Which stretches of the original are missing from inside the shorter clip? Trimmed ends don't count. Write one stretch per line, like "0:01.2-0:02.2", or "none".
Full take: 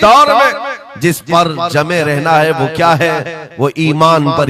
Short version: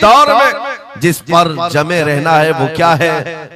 none